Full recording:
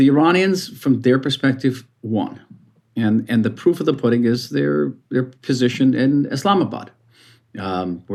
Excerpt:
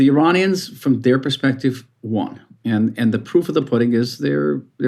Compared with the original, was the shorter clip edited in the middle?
yes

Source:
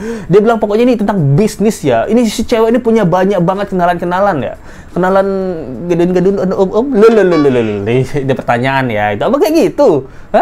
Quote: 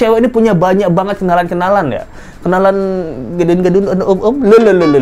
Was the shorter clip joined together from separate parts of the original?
no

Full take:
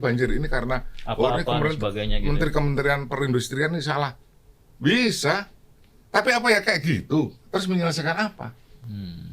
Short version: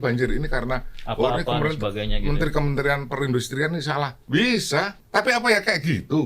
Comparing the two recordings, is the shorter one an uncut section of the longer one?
no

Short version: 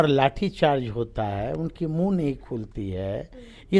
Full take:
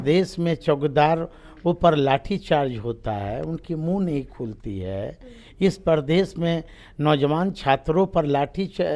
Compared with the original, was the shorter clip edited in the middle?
no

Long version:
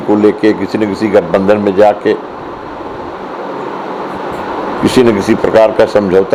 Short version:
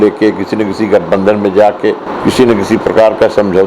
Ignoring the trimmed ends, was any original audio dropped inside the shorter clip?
yes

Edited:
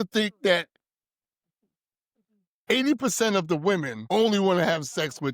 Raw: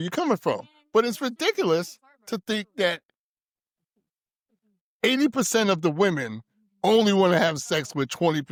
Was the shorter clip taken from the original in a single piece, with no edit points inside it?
no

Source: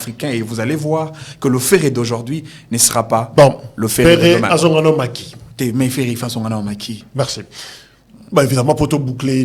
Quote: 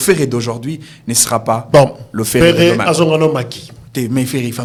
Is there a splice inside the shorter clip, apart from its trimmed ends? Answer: no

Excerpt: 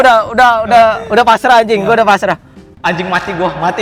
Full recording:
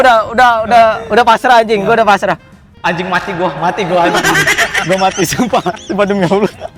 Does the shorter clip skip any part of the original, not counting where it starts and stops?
no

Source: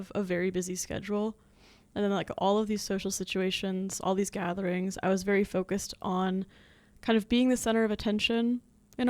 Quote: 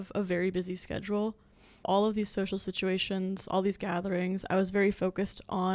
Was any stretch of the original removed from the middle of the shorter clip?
yes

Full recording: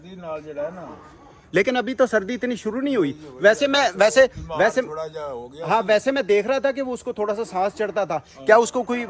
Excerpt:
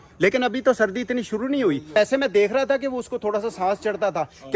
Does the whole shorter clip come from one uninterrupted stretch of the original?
no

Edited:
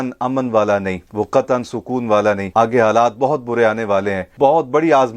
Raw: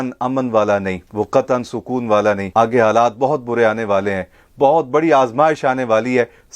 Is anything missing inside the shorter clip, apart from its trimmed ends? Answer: yes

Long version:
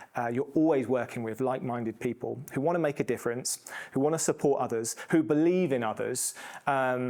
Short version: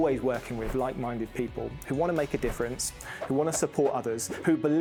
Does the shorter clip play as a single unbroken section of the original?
yes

